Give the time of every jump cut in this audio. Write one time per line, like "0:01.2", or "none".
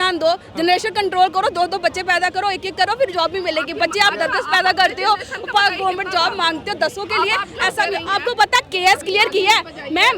none